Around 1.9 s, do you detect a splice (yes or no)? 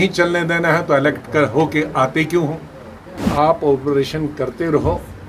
no